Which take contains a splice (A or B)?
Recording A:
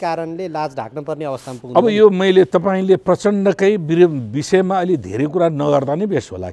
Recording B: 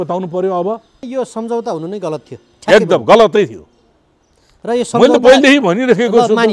B